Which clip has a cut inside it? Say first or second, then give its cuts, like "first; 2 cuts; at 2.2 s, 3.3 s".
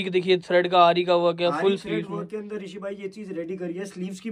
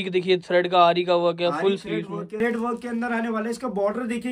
second; 1 cut; at 2.4 s